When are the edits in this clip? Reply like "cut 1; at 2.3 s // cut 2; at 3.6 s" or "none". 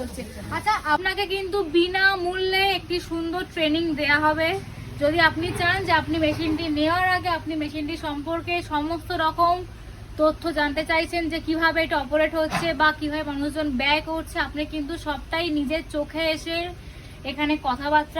cut 1; at 1.0 s